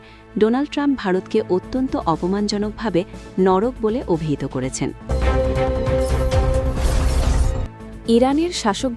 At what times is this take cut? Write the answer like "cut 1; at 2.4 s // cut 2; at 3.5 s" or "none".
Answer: cut 1; at 5.0 s // cut 2; at 7.8 s